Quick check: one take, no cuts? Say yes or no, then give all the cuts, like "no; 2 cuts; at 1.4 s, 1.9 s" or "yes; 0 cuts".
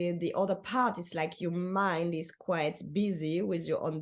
yes; 0 cuts